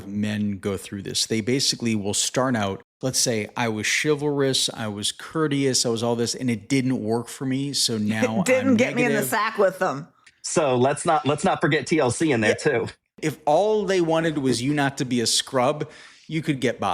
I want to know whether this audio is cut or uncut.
cut